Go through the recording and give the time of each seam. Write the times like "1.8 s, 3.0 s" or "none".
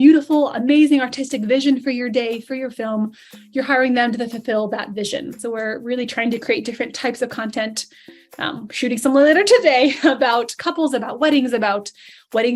5.3 s